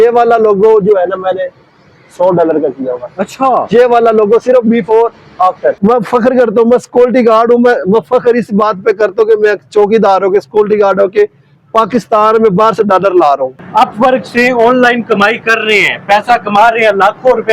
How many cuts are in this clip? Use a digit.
2